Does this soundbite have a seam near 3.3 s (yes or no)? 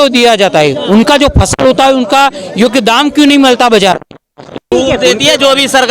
no